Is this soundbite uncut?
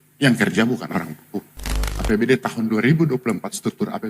no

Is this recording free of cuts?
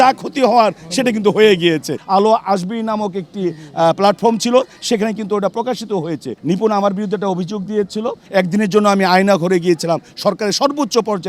no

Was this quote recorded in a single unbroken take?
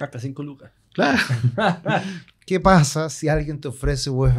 no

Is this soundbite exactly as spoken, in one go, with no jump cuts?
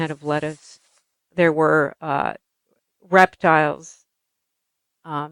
yes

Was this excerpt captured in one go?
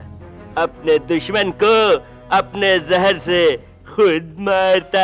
yes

